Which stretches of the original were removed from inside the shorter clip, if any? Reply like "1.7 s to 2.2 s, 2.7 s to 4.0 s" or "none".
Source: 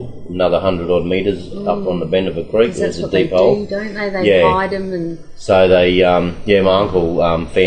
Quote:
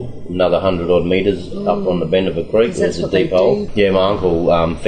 3.7 s to 6.4 s